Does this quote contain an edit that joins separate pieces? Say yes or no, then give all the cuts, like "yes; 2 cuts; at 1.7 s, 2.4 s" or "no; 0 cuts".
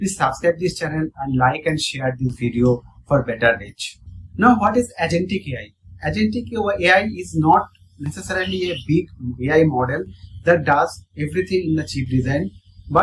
no; 0 cuts